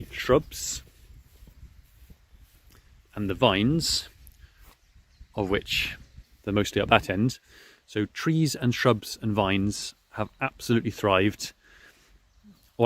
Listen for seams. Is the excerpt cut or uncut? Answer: cut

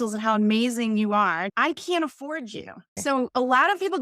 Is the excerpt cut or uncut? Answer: cut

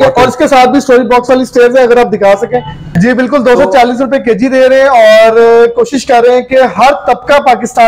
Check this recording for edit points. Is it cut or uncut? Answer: cut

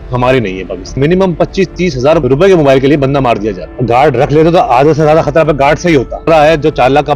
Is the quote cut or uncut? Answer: cut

